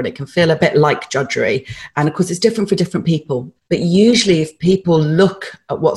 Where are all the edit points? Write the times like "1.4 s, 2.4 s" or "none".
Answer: 1.8 s, 3.5 s, 4.8 s